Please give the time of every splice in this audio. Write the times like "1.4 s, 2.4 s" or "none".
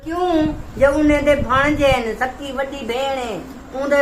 none